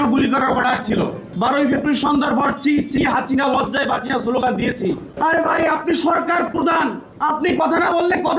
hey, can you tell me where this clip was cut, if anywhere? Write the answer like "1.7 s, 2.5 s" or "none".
1.2 s, 5.1 s, 7.1 s